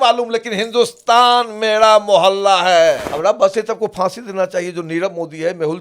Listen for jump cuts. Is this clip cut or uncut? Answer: cut